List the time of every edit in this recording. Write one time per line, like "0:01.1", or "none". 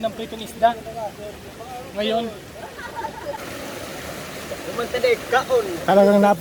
0:03.4